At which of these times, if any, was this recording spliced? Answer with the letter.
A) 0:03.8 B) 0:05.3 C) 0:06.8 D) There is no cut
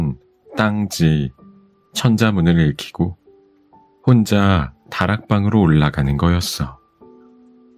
C